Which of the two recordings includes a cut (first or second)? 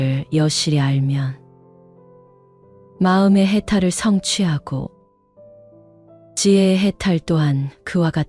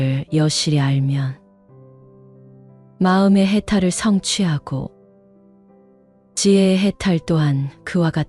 second